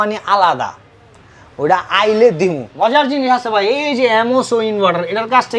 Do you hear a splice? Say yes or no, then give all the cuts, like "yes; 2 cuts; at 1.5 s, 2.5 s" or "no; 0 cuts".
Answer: yes; 1 cut; at 2.7 s